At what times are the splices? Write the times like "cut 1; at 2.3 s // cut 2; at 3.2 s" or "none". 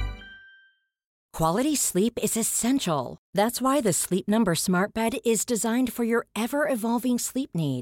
cut 1; at 1.2 s